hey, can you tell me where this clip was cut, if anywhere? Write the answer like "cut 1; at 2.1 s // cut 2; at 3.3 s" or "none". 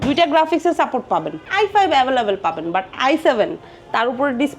cut 1; at 1.4 s